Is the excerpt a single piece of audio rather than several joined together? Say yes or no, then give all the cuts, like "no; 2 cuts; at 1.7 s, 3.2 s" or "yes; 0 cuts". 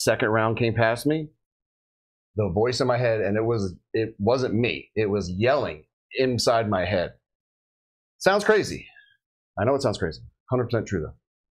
yes; 0 cuts